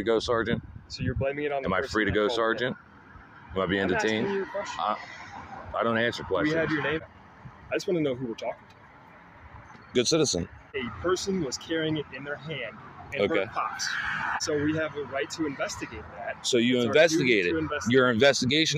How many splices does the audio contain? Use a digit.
3